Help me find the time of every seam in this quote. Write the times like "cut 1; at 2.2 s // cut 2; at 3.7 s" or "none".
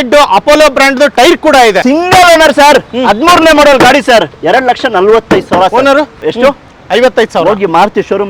cut 1; at 1.8 s // cut 2; at 4.4 s // cut 3; at 6.2 s